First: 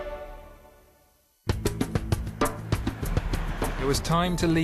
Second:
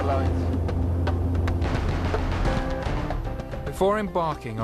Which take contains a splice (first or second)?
first